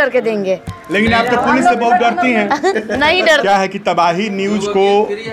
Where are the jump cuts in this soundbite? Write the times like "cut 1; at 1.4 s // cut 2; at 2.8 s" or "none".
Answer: cut 1; at 3.4 s